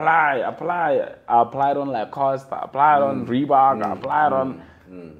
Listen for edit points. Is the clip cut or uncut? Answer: uncut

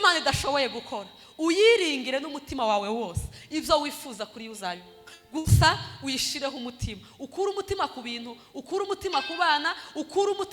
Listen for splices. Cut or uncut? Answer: uncut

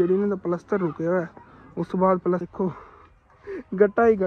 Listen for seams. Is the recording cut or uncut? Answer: cut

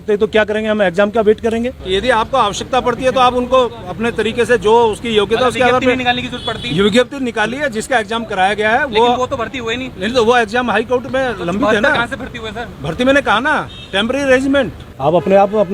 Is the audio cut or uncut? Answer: cut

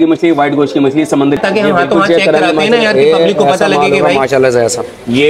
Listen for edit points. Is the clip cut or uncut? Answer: cut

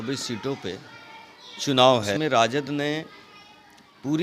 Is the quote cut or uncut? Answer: cut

